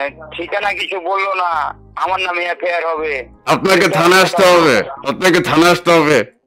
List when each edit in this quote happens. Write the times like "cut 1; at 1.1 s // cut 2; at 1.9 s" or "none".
none